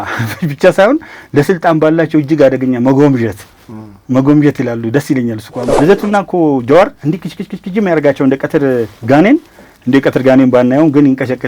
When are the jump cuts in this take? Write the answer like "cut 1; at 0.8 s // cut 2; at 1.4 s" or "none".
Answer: cut 1; at 5.6 s